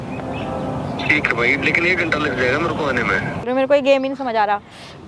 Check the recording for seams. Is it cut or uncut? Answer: cut